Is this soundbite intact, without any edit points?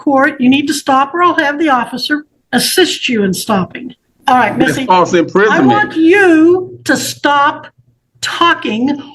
no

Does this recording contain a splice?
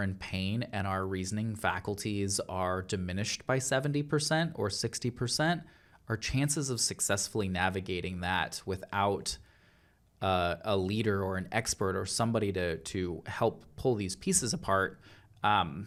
no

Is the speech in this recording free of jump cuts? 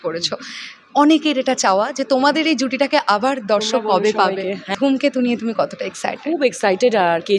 no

